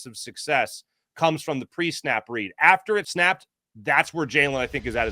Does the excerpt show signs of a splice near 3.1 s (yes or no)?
yes